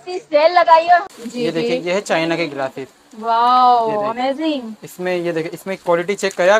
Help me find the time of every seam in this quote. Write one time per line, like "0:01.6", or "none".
0:01.1